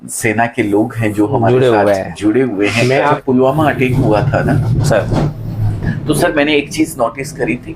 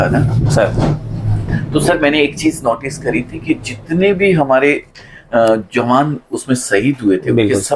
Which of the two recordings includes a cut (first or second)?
first